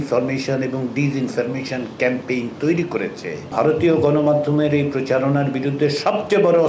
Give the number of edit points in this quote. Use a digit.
1